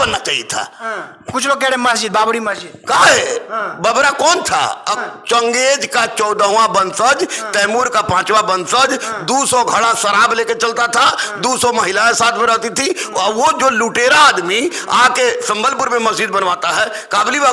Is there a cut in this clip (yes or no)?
no